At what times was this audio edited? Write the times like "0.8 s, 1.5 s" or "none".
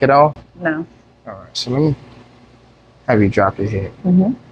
none